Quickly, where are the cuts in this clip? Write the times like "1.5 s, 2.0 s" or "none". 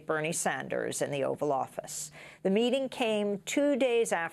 none

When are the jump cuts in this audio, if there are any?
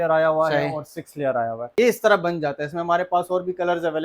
1.7 s

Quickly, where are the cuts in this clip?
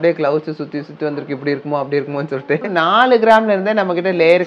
2.7 s

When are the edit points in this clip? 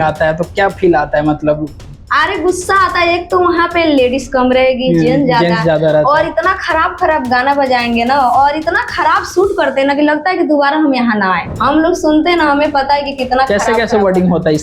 11.5 s

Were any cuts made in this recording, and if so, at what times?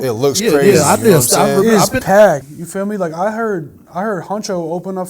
2.4 s

